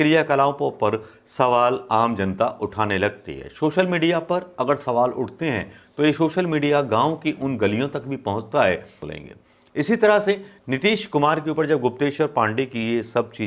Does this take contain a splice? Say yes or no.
yes